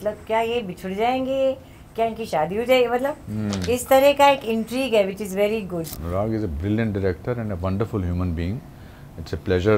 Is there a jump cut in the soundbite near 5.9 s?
yes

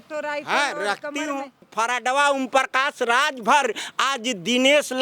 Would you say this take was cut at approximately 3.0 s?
no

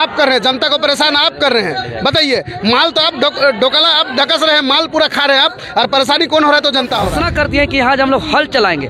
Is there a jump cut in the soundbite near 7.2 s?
yes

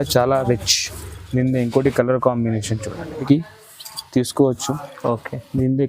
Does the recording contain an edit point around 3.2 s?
yes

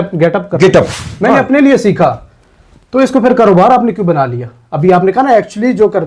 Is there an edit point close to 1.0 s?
yes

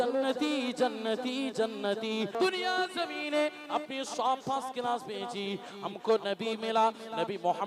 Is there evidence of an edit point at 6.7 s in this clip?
no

